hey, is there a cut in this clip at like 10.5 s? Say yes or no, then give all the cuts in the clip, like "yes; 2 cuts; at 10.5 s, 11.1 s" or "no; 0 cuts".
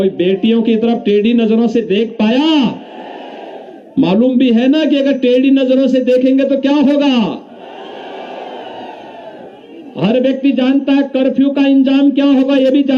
no; 0 cuts